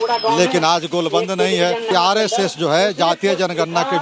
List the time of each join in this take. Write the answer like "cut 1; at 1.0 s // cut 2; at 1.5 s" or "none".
cut 1; at 1.9 s